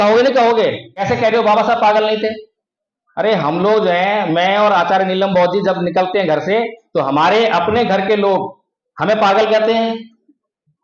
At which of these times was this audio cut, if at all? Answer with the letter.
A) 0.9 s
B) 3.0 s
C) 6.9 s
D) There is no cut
A